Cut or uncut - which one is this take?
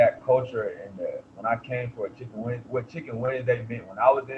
uncut